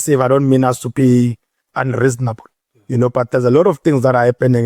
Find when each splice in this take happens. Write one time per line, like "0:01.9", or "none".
none